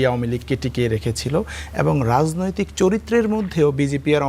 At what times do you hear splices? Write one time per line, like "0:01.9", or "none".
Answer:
none